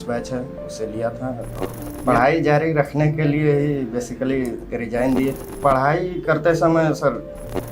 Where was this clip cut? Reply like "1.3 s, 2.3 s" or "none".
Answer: 1.9 s, 5.5 s